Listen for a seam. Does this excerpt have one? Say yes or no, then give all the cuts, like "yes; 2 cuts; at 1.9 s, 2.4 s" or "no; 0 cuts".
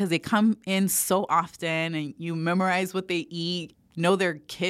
yes; 1 cut; at 3.6 s